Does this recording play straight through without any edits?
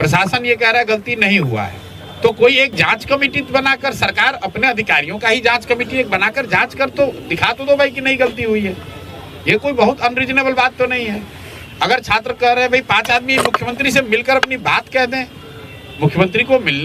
yes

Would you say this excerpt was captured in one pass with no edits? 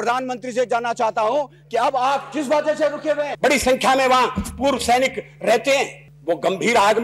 no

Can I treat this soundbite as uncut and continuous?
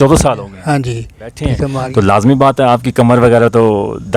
no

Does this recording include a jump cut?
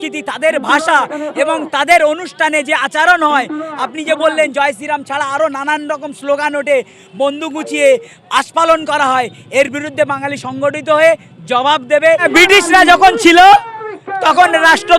yes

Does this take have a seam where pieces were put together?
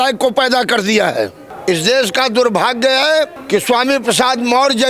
yes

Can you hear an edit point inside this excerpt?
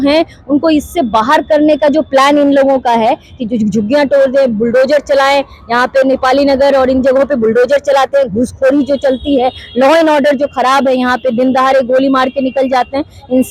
no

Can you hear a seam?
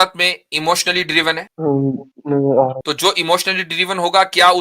yes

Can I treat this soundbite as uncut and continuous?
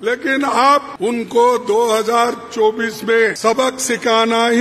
no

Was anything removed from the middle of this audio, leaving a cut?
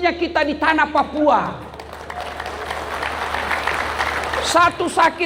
no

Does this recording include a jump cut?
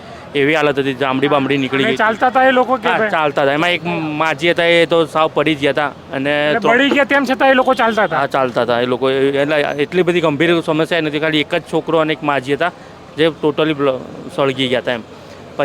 no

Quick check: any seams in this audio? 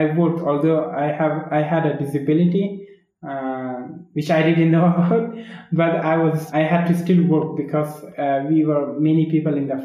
yes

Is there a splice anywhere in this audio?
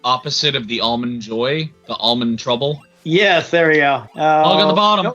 yes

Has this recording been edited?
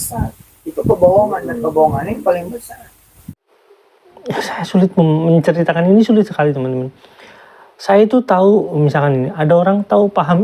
yes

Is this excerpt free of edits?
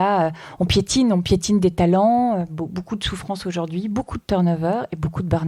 yes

